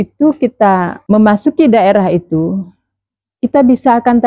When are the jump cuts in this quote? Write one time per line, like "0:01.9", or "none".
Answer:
0:00.9